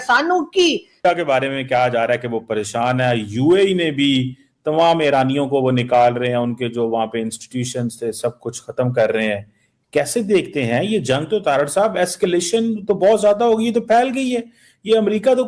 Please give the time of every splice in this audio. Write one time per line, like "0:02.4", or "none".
0:00.9